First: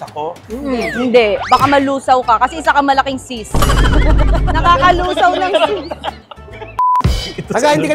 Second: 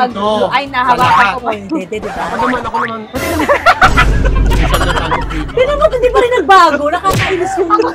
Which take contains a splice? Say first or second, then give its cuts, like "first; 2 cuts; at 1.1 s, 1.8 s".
first; 1 cut; at 7.0 s